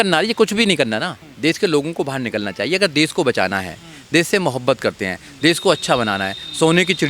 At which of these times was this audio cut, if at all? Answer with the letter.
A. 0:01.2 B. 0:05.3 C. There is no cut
A